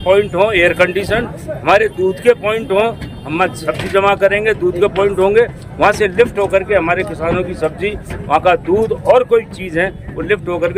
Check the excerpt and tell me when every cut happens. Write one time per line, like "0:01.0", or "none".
none